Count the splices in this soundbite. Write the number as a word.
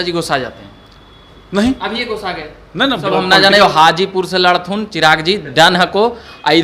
one